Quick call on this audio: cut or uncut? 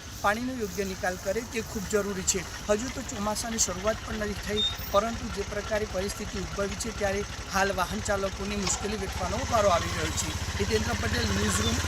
uncut